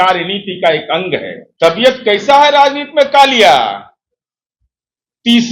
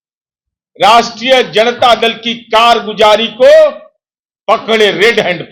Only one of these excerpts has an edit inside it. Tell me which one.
first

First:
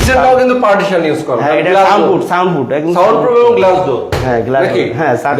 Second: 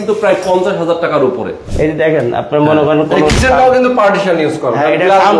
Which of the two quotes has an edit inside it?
second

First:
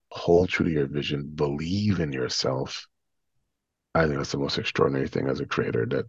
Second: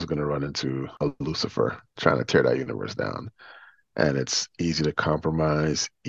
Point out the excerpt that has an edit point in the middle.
second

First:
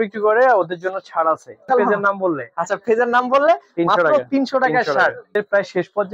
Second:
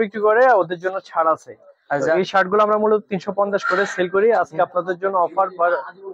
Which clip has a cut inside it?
first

